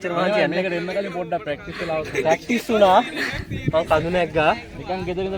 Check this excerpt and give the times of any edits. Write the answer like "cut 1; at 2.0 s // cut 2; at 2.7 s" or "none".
none